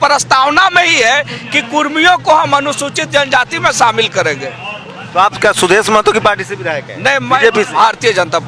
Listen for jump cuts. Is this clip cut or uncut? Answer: uncut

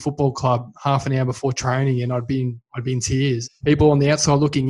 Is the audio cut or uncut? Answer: cut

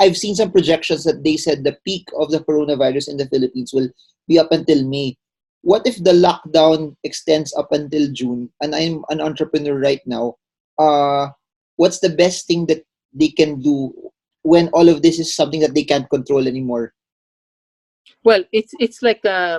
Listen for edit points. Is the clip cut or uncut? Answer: uncut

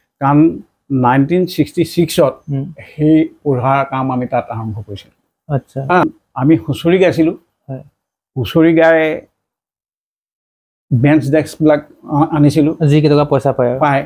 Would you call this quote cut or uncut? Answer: cut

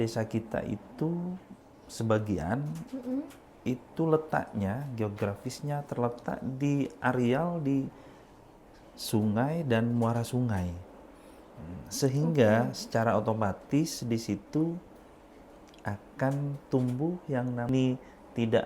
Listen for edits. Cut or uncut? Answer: cut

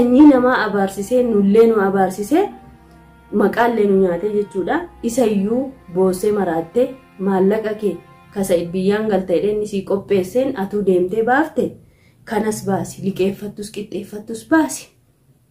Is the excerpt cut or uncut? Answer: uncut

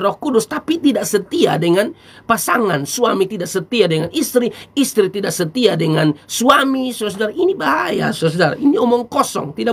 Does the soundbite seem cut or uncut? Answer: uncut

